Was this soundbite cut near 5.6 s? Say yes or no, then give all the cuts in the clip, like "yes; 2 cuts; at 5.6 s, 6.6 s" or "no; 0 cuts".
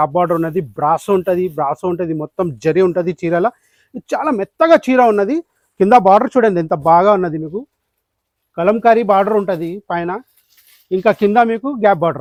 no; 0 cuts